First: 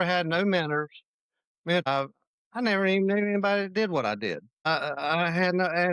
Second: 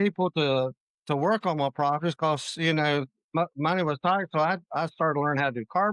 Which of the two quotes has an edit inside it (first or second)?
first